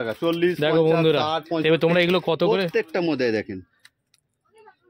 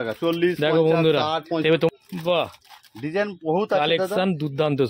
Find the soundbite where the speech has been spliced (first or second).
second